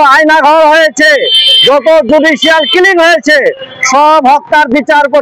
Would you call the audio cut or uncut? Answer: uncut